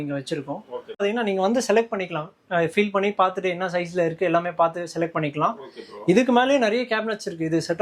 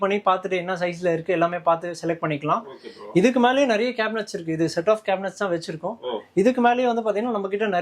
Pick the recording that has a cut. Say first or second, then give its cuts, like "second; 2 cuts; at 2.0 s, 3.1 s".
first; 1 cut; at 1.0 s